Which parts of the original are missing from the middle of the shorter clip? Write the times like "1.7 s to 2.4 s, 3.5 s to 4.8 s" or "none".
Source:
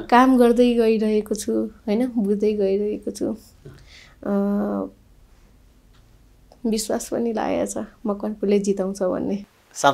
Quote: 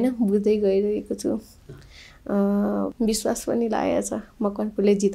4.9 s to 6.6 s